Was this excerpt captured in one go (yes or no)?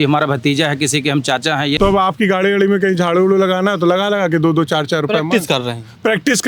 no